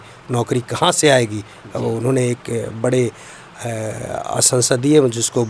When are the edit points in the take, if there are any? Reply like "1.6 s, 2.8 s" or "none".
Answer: none